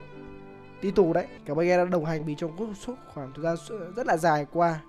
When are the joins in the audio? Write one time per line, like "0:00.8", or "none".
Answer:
0:01.4